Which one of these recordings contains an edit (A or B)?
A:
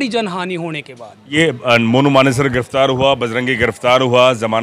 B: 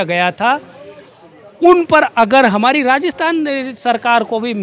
A